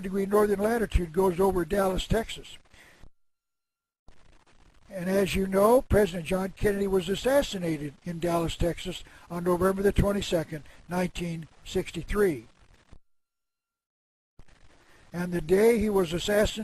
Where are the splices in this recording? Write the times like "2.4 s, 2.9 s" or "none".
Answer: none